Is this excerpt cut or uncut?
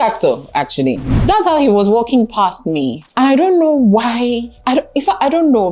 cut